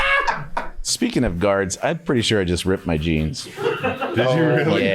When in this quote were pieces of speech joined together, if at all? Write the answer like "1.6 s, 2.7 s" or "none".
0.9 s